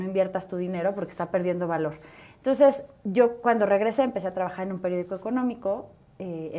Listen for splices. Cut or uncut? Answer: uncut